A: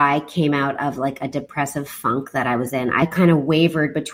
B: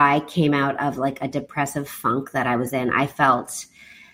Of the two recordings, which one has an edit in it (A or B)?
A